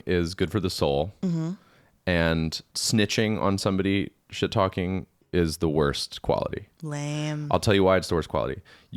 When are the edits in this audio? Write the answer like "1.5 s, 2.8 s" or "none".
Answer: 2.7 s, 5.2 s